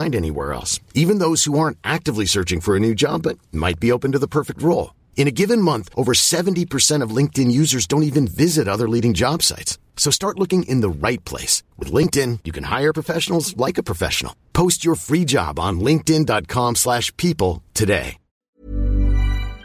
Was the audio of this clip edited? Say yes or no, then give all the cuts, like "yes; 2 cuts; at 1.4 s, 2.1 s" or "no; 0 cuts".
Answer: yes; 1 cut; at 18.5 s